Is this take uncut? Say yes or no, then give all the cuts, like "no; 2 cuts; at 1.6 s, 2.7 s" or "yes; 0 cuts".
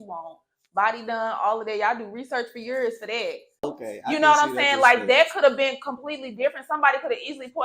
no; 1 cut; at 3.8 s